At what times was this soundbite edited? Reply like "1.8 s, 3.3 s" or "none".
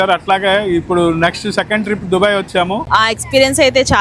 2.9 s

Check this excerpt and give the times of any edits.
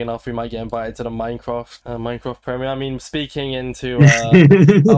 none

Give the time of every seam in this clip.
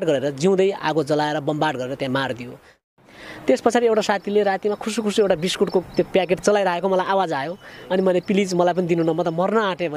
2.8 s

